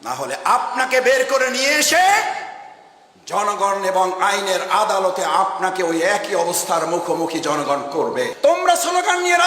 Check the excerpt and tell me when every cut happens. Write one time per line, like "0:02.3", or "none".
0:08.3